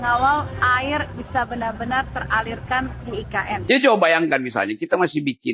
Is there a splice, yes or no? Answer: yes